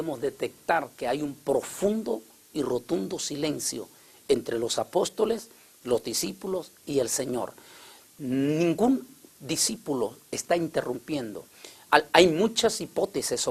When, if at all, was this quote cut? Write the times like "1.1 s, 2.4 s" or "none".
9.0 s

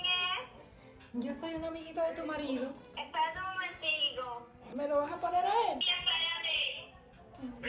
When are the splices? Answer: 2.9 s, 4.6 s, 5.8 s

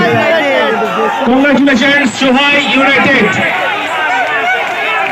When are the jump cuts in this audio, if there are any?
none

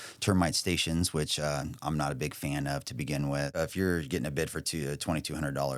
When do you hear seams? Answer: 3.5 s

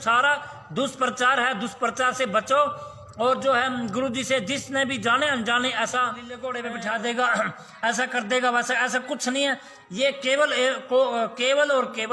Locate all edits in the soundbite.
6.4 s

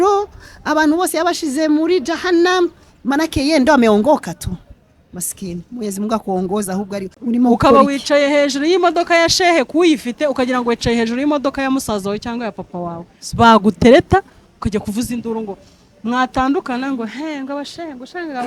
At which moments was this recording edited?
7.1 s

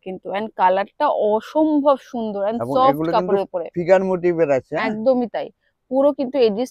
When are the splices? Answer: none

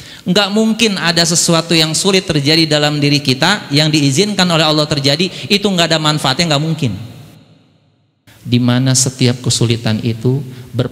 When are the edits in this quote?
7.9 s

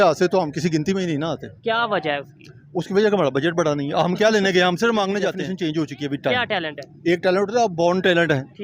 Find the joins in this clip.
5.5 s

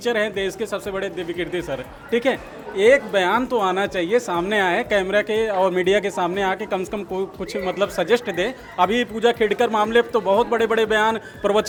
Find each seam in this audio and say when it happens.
none

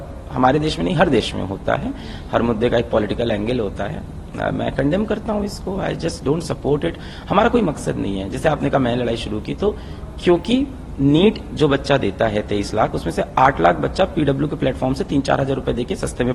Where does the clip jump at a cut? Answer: none

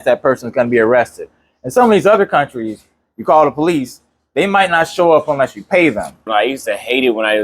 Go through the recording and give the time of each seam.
6.3 s

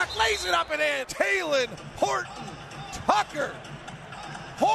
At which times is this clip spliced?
1.1 s

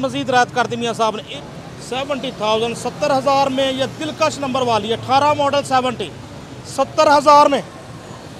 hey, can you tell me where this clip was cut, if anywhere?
1.2 s

